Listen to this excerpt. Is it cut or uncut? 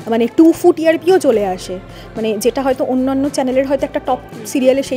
uncut